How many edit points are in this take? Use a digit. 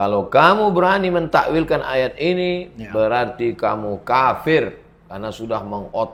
0